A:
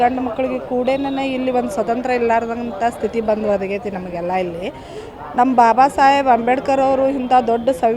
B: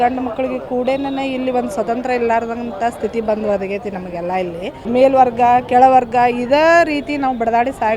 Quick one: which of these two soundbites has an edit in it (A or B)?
B